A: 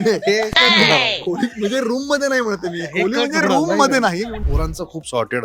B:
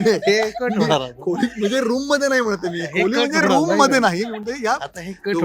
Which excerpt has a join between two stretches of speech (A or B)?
A